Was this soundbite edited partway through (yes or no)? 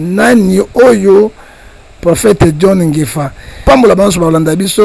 yes